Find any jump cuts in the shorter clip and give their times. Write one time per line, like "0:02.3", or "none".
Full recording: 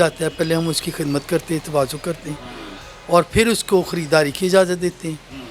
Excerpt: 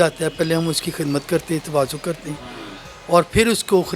none